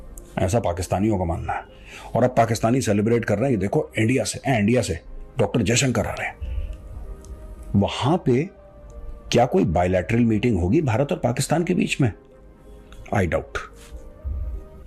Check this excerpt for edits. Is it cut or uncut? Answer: uncut